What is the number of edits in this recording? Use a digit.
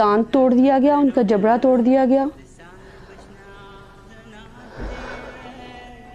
0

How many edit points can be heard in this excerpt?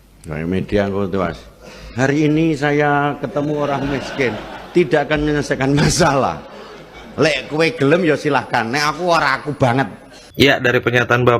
1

